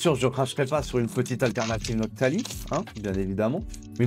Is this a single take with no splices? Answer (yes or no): yes